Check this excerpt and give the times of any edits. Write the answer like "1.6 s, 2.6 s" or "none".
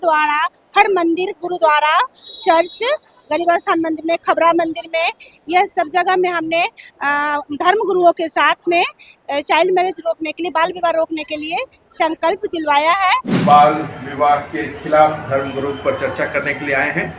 13.3 s